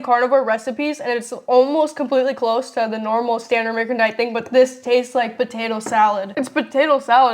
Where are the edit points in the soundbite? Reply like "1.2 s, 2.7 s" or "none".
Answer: 6.3 s